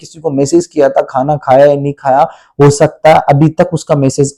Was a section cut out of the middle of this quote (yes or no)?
no